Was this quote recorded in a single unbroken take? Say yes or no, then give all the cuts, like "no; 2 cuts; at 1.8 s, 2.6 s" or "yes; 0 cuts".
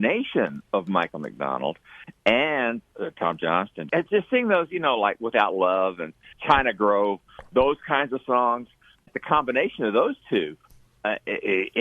no; 3 cuts; at 3.9 s, 6.4 s, 9.1 s